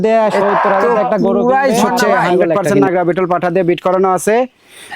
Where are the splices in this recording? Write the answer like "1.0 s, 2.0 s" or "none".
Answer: 2.6 s